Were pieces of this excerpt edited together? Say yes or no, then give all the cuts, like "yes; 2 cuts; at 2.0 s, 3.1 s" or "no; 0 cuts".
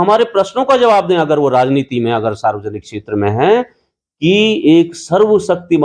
no; 0 cuts